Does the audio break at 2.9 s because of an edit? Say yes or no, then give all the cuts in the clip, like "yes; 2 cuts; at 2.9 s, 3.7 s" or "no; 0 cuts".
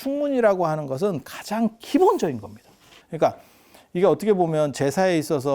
yes; 1 cut; at 2.9 s